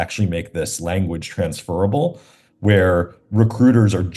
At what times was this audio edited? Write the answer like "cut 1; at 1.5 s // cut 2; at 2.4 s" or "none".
none